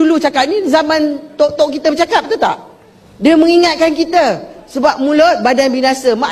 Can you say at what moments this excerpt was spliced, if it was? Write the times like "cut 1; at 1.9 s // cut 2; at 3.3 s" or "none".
none